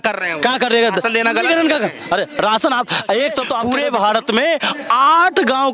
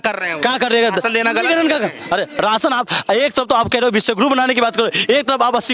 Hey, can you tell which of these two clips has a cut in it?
first; 1 cut; at 3.6 s

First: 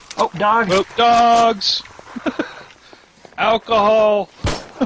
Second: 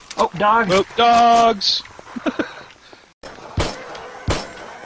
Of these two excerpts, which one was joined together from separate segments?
second; 1 cut; at 3.3 s

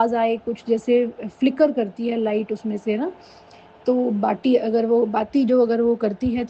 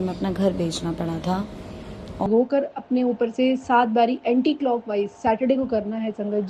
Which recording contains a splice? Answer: second; 1 cut; at 2.3 s

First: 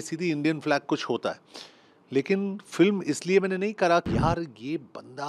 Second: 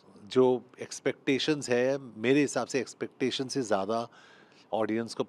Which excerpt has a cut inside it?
first; 1 cut; at 4.1 s

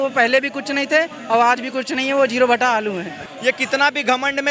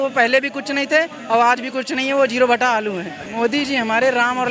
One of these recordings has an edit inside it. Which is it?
first; 1 cut; at 3.2 s

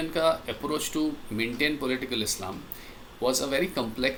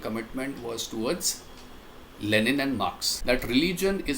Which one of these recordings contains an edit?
second; 1 cut; at 3.1 s

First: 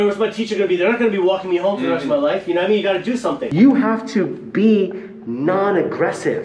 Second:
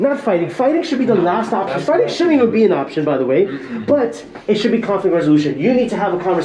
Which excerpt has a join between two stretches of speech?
first; 1 cut; at 3.4 s

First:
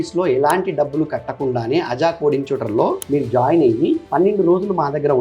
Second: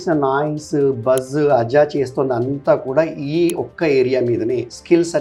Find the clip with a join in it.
first; 2 cuts; at 3.0 s, 4.1 s

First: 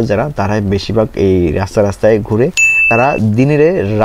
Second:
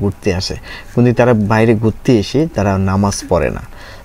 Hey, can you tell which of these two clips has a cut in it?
first; 1 cut; at 2.7 s

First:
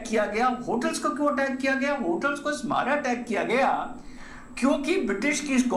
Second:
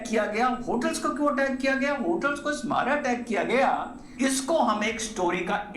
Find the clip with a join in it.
second; 1 cut; at 4.0 s

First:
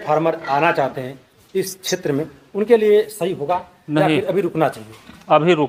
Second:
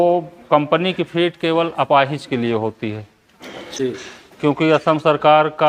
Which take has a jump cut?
second; 1 cut; at 3.6 s

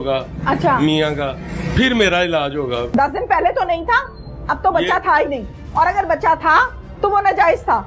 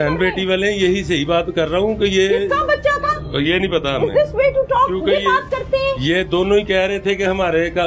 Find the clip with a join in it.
first; 1 cut; at 2.9 s

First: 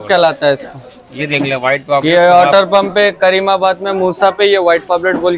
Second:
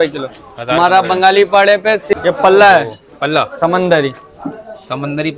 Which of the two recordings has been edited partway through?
second; 1 cut; at 2.1 s

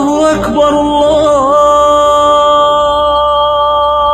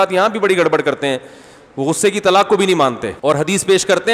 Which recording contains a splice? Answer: second; 1 cut; at 3.1 s

